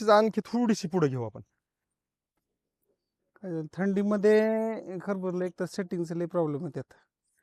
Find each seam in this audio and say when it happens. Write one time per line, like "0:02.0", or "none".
0:02.4